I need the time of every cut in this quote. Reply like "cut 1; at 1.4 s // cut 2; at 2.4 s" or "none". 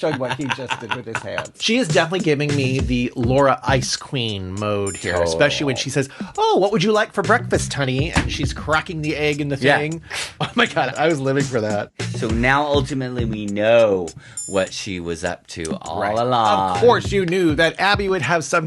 cut 1; at 1.5 s // cut 2; at 10.9 s // cut 3; at 12.0 s